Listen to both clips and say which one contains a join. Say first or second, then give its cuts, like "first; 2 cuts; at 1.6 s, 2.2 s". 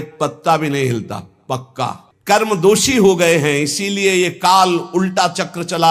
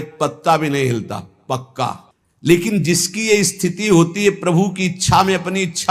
first; 1 cut; at 2.1 s